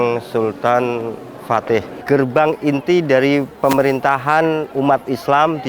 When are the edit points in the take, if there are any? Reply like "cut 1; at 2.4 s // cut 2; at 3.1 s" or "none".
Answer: cut 1; at 2.0 s